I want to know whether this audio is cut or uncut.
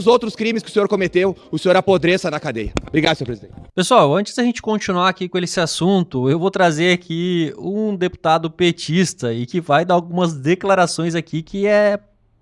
uncut